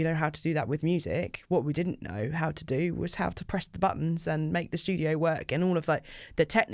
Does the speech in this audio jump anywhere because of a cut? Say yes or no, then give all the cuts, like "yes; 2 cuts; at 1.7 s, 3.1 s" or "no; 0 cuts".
no; 0 cuts